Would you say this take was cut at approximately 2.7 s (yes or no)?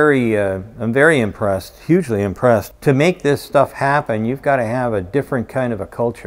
yes